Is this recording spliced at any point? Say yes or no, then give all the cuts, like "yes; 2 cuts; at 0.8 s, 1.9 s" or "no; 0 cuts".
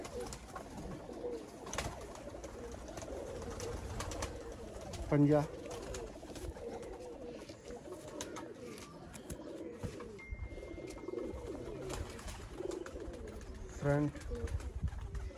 no; 0 cuts